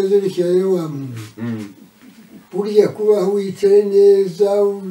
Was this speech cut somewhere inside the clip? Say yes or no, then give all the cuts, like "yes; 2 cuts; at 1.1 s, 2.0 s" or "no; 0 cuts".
no; 0 cuts